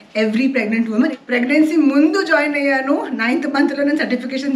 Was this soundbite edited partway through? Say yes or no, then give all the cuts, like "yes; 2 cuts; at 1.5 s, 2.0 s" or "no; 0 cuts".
yes; 1 cut; at 1.1 s